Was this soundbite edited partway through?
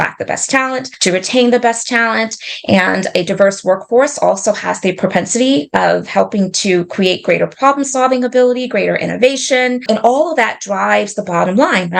yes; 2 cuts; at 0.9 s, 9.8 s

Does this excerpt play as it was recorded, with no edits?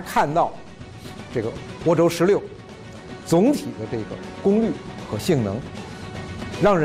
yes; 0 cuts

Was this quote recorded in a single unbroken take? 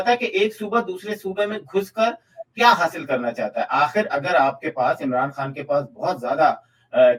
yes; 0 cuts

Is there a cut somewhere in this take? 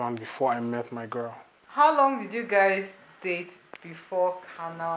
yes; 1 cut; at 1.5 s

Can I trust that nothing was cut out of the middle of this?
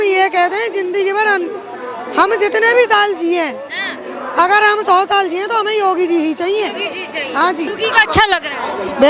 yes; 0 cuts

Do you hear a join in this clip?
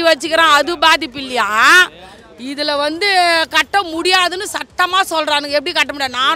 no; 0 cuts

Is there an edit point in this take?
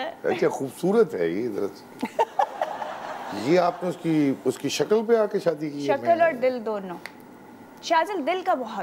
no; 0 cuts

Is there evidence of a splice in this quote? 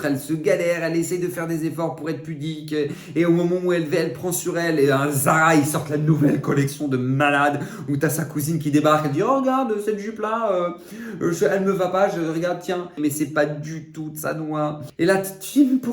yes; 2 cuts; at 13.0 s, 14.8 s

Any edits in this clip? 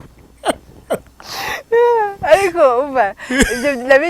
no; 0 cuts

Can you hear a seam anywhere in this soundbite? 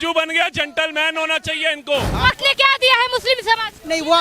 yes; 1 cut; at 2.1 s

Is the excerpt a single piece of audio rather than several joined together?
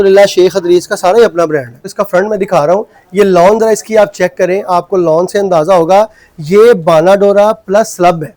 no; 1 cut; at 1.9 s

